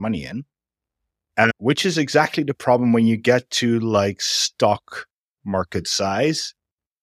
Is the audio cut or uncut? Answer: cut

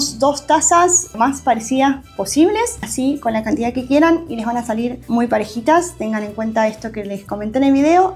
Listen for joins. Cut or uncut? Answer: cut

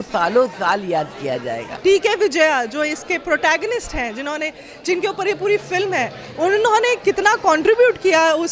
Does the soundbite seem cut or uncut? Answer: cut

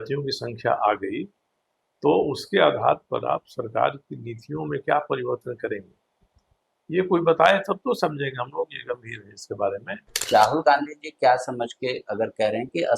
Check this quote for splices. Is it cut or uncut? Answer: cut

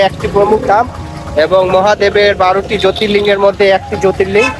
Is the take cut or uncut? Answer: uncut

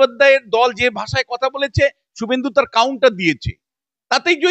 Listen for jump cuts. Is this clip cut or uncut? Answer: uncut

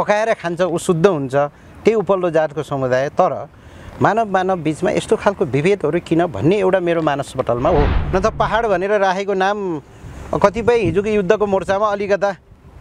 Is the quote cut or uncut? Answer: cut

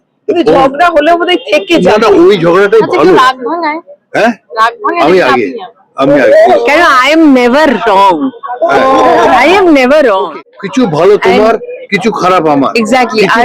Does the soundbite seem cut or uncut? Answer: cut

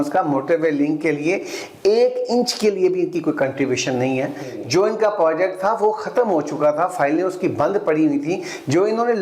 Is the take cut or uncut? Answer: uncut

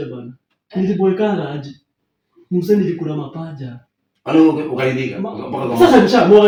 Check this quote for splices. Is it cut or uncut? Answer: uncut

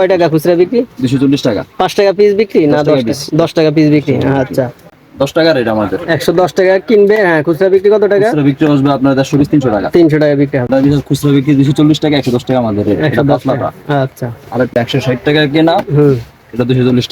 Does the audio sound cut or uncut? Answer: cut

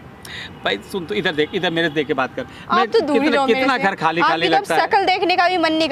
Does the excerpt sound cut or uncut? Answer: uncut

